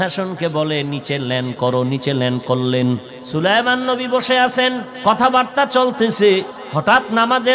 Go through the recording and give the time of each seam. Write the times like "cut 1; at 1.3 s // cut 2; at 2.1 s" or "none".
cut 1; at 3.2 s // cut 2; at 4.9 s // cut 3; at 6.6 s